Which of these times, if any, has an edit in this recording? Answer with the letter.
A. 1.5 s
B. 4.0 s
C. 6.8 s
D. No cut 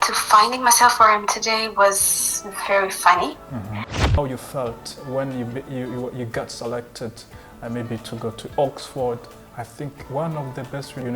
B